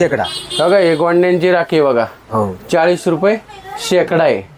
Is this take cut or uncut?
uncut